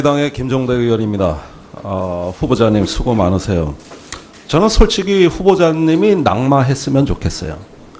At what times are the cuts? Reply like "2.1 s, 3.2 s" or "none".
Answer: none